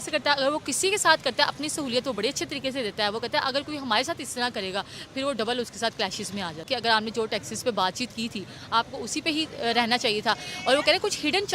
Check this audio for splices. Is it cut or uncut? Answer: cut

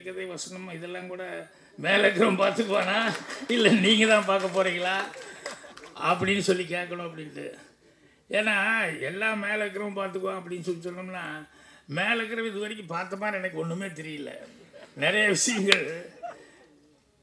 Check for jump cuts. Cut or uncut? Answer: uncut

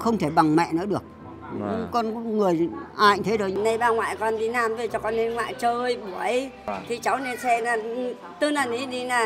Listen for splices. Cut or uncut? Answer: cut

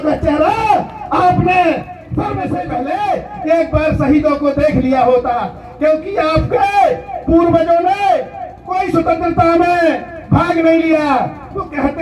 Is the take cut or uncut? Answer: cut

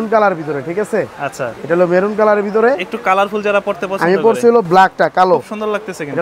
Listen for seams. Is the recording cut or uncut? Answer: uncut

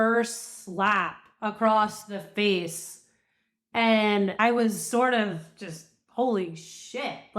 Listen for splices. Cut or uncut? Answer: cut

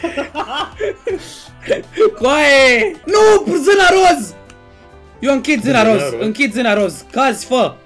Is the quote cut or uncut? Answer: cut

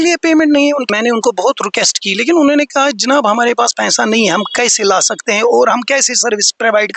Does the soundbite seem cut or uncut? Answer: cut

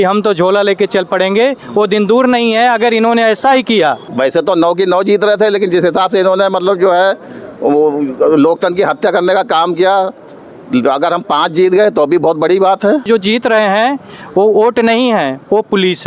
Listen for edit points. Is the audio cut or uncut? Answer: cut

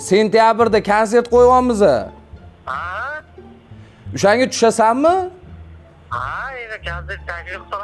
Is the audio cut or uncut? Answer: uncut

